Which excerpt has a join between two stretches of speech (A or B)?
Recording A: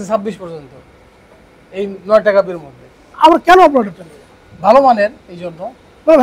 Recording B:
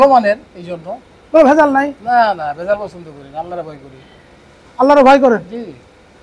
A